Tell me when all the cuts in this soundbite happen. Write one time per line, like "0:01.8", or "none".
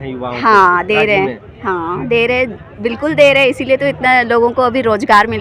none